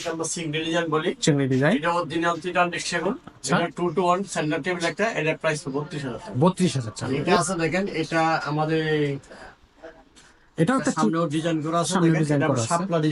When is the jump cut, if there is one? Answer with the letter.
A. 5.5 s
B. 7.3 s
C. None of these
B